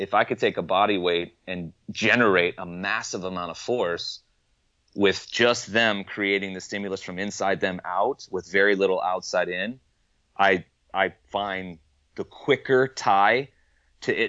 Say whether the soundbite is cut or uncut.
cut